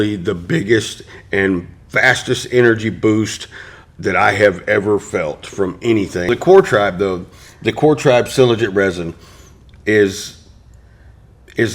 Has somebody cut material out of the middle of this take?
yes; 1 cut; at 6.3 s

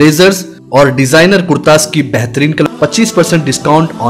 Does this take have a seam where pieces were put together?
yes; 1 cut; at 2.6 s

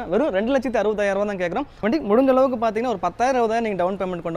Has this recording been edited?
yes; 1 cut; at 1.7 s

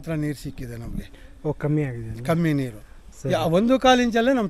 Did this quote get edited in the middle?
no; 0 cuts

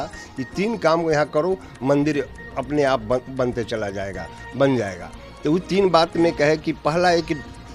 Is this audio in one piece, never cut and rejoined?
yes; 0 cuts

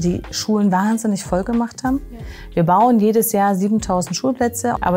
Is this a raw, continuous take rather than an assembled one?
yes; 0 cuts

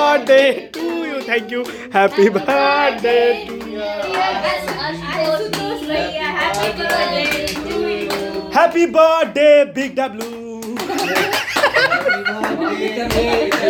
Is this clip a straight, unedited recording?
yes; 0 cuts

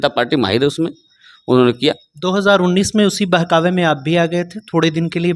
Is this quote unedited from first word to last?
yes; 0 cuts

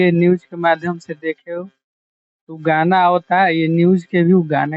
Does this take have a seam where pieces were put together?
no; 0 cuts

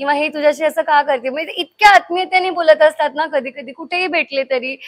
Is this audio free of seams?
yes; 0 cuts

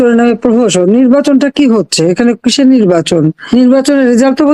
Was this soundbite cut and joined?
yes; 1 cut; at 3.4 s

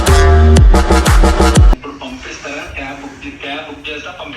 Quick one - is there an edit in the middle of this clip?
yes; 1 cut; at 1.8 s

